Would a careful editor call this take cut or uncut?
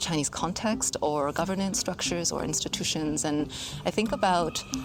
uncut